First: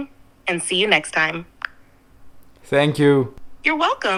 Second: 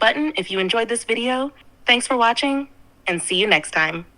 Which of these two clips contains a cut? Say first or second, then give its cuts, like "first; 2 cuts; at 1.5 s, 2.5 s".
second; 1 cut; at 1.7 s